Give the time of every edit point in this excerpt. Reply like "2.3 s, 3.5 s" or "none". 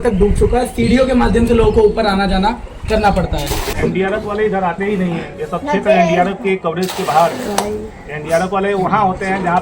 3.6 s